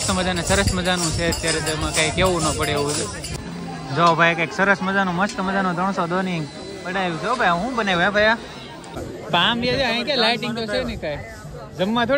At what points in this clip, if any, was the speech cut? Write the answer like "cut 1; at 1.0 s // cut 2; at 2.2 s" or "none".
cut 1; at 3.4 s // cut 2; at 9.0 s